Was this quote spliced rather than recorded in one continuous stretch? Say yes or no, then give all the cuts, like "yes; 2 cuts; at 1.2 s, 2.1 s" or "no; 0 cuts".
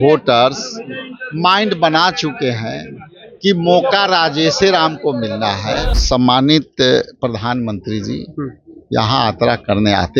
yes; 1 cut; at 5.9 s